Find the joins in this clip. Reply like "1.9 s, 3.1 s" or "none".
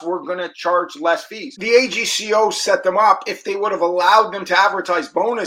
1.5 s